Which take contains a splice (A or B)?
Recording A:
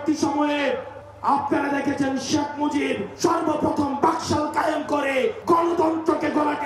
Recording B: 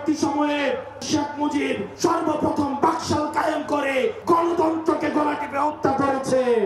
B